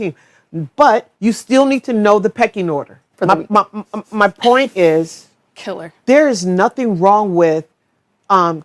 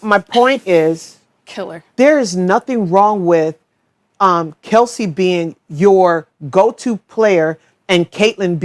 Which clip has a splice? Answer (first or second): first